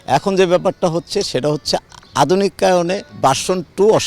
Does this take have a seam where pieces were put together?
yes; 1 cut; at 3.1 s

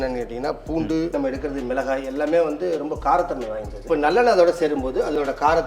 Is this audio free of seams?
no; 2 cuts; at 1.1 s, 3.8 s

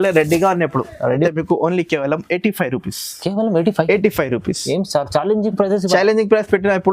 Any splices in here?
yes; 1 cut; at 1.3 s

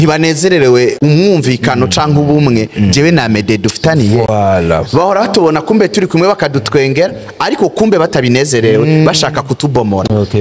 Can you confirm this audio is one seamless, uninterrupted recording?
no; 1 cut; at 1.0 s

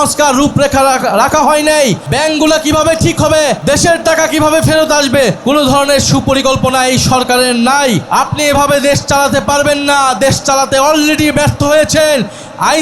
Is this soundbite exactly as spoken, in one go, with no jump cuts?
no; 4 cuts; at 2.0 s, 3.6 s, 5.4 s, 8.0 s

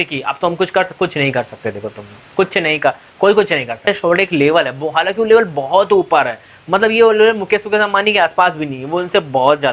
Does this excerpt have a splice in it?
yes; 1 cut; at 3.9 s

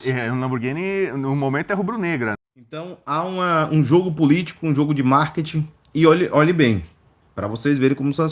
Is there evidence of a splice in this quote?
yes; 1 cut; at 2.9 s

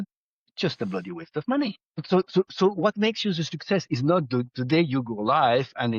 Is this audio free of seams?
no; 1 cut; at 2.0 s

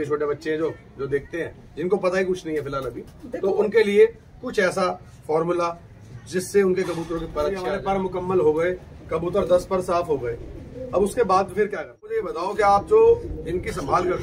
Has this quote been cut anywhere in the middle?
yes; 2 cuts; at 7.7 s, 12.3 s

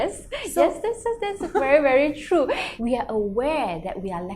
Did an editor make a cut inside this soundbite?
yes; 1 cut; at 2.7 s

